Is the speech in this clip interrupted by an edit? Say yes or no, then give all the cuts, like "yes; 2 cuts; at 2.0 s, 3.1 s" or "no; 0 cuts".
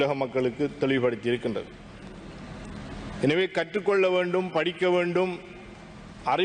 no; 0 cuts